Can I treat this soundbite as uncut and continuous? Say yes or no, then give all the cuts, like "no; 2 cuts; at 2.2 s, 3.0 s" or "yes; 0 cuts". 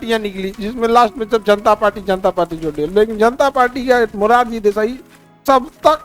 yes; 0 cuts